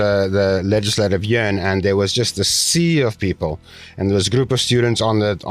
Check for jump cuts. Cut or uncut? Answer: uncut